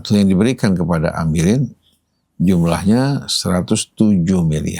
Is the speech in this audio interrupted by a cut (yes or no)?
no